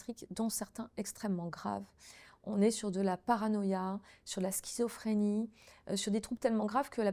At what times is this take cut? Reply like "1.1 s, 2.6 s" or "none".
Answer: none

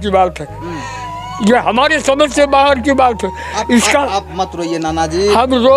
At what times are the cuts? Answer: none

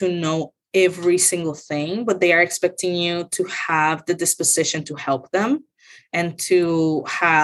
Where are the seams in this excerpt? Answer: none

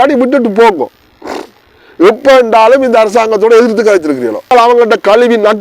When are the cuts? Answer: 4.5 s

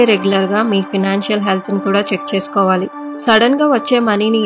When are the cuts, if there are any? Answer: 3.1 s

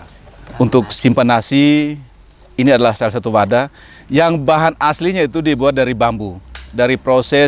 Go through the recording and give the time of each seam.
none

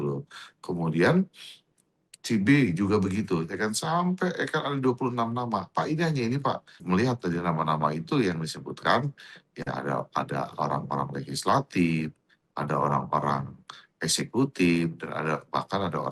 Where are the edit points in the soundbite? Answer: 6.7 s

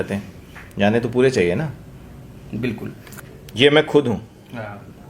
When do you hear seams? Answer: 3.1 s

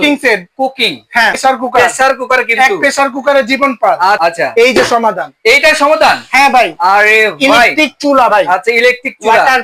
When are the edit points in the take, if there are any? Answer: 1.4 s, 4.2 s

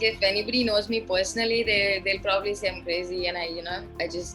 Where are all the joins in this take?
none

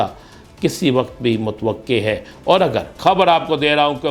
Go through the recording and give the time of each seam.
2.9 s

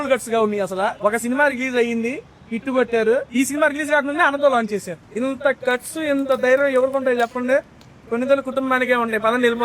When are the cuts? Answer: 1.0 s, 3.3 s, 5.0 s

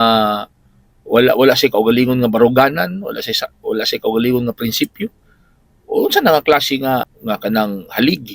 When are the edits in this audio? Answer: 7.1 s

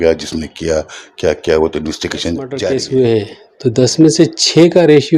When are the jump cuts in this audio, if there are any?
2.6 s

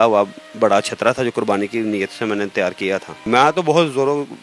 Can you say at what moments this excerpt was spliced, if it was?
3.1 s

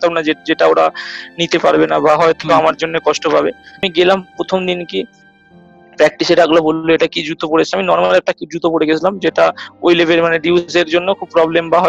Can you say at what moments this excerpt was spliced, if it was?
3.8 s

